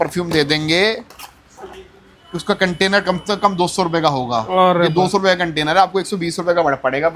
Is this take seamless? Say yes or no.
yes